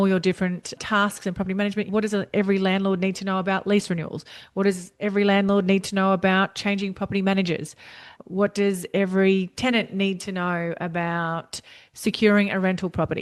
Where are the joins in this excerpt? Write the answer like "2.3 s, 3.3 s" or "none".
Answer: 1.9 s